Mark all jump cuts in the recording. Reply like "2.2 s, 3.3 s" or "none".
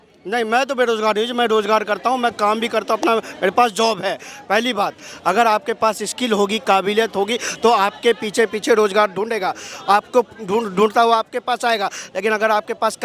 none

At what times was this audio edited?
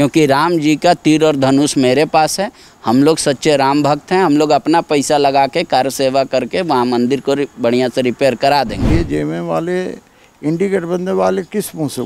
8.8 s

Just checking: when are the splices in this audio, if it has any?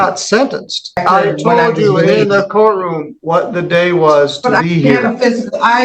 1.0 s

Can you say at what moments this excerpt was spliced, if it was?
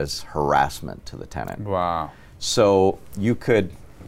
none

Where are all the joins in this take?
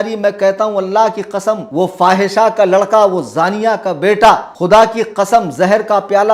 1.6 s, 4.5 s

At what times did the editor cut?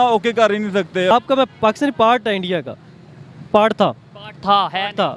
1.1 s

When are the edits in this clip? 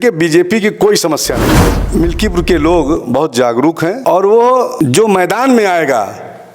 1.8 s, 4.0 s, 4.7 s

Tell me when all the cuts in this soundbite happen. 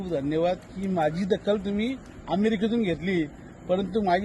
none

